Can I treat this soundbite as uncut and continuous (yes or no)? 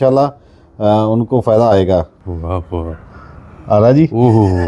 no